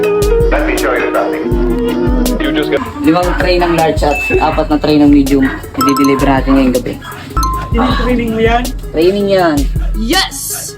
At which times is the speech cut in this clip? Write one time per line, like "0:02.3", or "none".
0:02.8
0:07.4